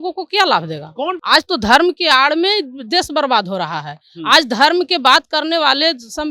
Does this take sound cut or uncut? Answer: cut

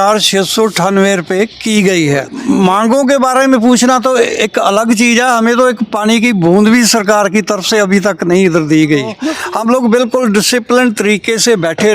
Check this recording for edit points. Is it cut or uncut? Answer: cut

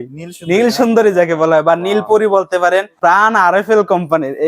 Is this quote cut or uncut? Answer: cut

